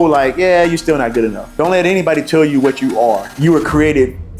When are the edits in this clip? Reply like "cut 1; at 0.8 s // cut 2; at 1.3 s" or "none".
cut 1; at 1.4 s // cut 2; at 3.3 s